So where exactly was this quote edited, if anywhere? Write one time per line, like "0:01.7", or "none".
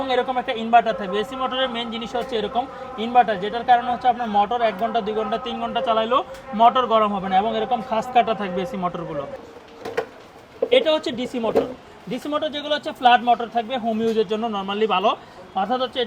0:09.3